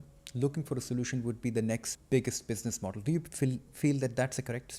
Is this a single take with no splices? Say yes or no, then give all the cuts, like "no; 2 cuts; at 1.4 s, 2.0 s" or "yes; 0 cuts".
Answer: no; 1 cut; at 1.9 s